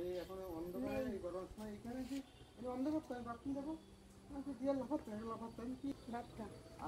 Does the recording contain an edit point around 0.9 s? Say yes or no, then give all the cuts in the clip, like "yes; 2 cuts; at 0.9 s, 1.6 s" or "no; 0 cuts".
no; 1 cut; at 5.9 s